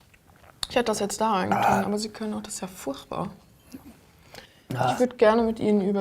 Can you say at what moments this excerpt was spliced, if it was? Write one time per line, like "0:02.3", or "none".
0:05.0